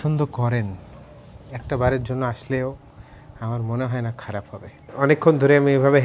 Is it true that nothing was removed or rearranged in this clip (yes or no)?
no